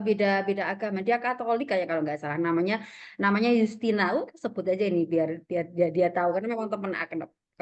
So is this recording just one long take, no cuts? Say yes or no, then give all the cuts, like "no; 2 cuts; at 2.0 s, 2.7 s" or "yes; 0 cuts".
yes; 0 cuts